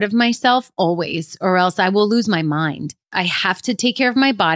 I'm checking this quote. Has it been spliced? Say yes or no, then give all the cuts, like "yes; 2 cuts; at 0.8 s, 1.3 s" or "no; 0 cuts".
yes; 1 cut; at 3.1 s